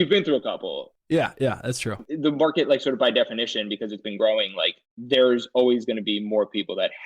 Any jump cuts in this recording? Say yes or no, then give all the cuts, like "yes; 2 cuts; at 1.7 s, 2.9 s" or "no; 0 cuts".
yes; 1 cut; at 2.0 s